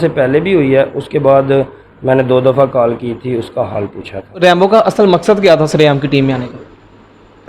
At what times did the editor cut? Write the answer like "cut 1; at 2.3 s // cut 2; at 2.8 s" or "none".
cut 1; at 4.3 s